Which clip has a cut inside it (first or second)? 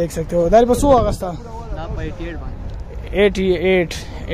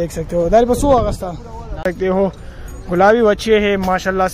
second